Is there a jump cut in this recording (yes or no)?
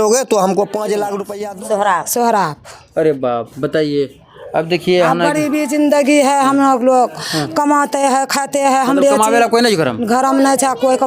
yes